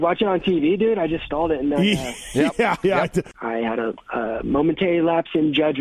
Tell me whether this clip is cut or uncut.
uncut